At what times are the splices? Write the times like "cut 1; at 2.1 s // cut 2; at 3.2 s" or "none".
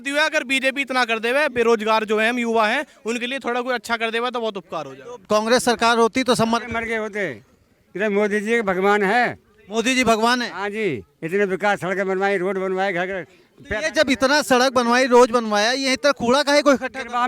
cut 1; at 5.2 s

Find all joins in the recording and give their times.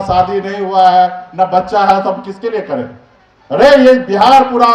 none

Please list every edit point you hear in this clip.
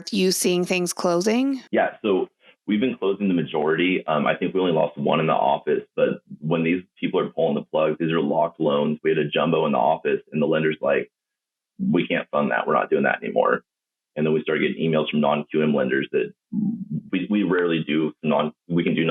cut 1; at 1.6 s

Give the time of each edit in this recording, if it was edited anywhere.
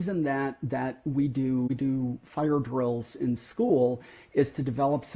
none

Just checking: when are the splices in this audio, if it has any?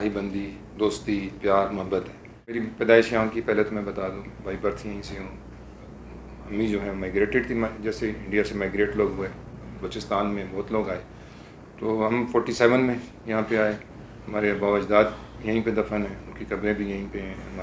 cut 1; at 2.6 s

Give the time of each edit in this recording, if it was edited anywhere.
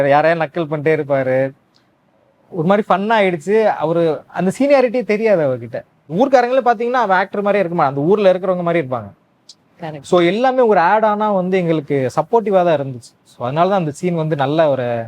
cut 1; at 6.0 s

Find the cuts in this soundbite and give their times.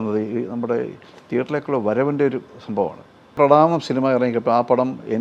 cut 1; at 3.3 s

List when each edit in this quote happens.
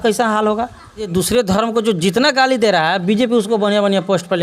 cut 1; at 1.1 s

